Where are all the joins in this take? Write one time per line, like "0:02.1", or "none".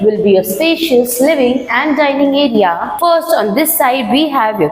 0:02.9